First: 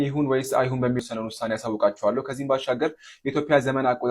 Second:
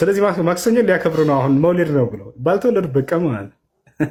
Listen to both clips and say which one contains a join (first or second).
first